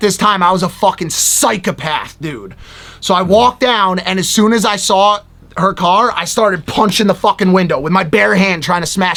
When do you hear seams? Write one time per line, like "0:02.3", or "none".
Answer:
none